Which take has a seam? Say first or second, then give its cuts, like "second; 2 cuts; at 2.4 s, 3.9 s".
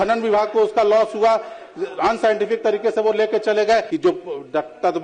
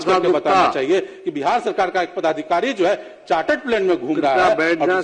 first; 1 cut; at 3.9 s